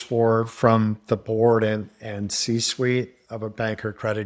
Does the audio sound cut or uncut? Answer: cut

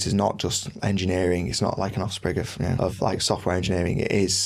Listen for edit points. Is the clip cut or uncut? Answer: uncut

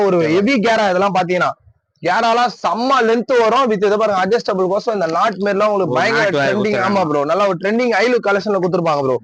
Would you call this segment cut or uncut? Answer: uncut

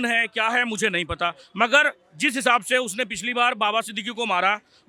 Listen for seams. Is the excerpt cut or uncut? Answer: uncut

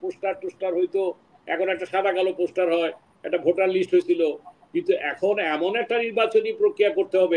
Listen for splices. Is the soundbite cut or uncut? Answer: uncut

